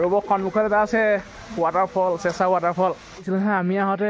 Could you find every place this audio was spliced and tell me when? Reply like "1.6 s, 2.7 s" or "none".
3.1 s